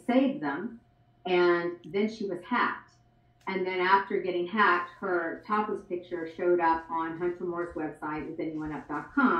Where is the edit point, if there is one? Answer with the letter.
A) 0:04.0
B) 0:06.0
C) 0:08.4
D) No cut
D